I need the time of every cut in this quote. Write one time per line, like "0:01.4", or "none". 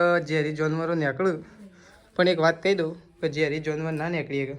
none